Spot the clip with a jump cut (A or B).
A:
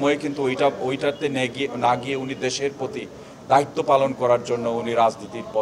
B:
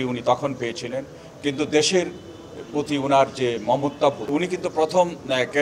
B